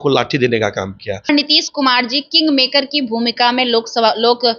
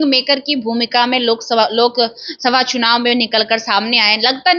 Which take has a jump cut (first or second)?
first